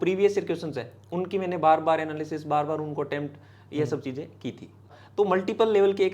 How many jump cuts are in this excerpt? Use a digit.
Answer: 1